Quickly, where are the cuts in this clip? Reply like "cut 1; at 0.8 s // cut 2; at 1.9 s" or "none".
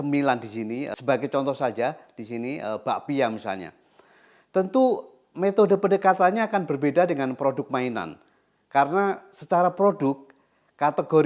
cut 1; at 0.9 s